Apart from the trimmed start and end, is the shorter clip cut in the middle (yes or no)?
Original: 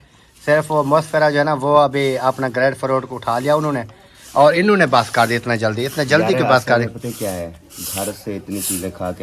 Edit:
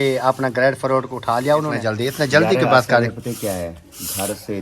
yes